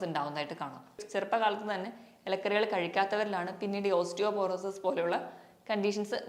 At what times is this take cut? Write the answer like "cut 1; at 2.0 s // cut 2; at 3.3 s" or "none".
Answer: cut 1; at 1.0 s